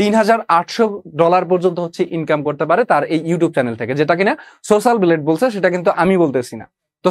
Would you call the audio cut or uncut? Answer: uncut